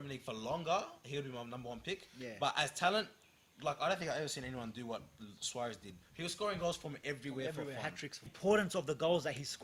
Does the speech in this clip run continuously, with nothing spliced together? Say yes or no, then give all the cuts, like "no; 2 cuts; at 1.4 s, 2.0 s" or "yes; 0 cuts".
no; 1 cut; at 8.3 s